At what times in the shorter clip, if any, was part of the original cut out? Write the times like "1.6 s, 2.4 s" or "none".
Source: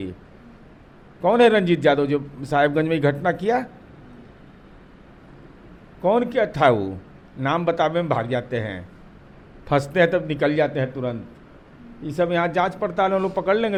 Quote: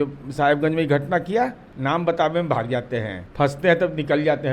1.7 s, 3.2 s

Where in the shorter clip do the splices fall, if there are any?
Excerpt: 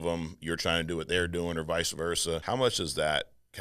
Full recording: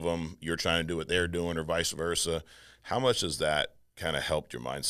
2.4 s

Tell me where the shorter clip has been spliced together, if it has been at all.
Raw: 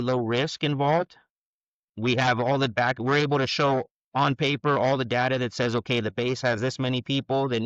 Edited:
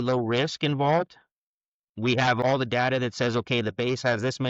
2.4 s

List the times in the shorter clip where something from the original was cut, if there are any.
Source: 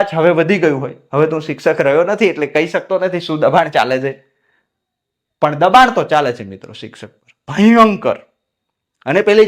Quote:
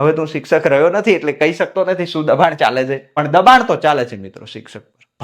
3.2 s

